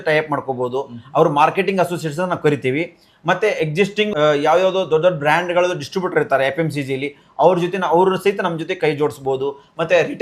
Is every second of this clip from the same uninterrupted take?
no; 1 cut; at 4.1 s

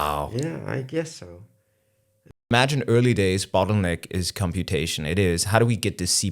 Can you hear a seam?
yes; 1 cut; at 2.5 s

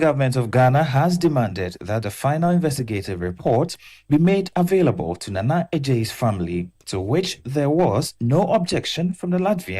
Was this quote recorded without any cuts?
yes; 0 cuts

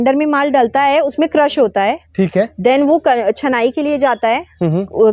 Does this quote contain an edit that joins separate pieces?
no; 0 cuts

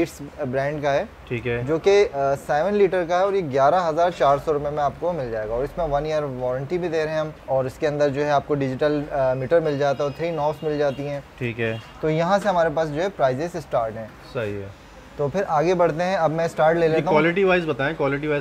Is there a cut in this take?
no; 0 cuts

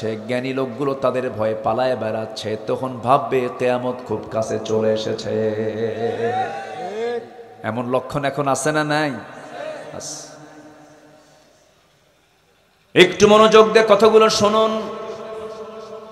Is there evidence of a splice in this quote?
no; 0 cuts

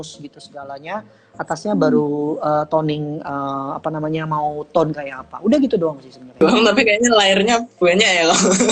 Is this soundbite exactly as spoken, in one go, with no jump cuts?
no; 1 cut; at 6.4 s

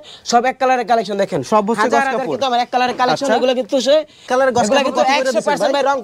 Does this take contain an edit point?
no; 0 cuts

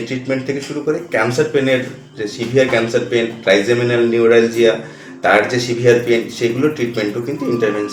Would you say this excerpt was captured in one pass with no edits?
yes; 0 cuts

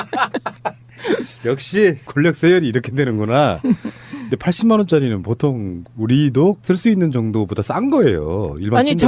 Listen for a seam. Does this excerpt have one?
yes; 1 cut; at 1.4 s

